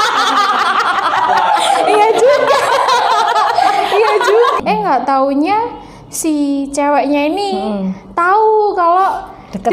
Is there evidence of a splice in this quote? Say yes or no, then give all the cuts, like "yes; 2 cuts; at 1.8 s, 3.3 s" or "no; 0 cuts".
yes; 1 cut; at 4.6 s